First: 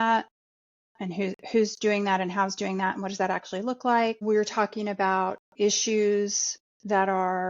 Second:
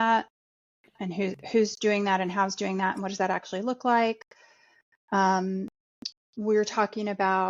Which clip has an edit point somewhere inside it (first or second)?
first